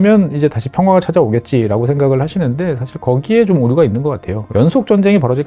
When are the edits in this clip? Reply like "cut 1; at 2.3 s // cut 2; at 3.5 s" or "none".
cut 1; at 4.3 s